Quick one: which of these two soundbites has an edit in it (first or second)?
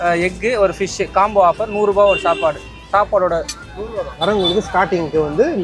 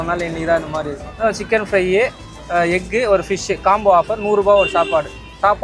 first